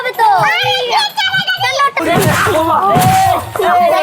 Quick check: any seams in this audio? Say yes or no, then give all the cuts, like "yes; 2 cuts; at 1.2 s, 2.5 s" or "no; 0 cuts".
yes; 1 cut; at 2.0 s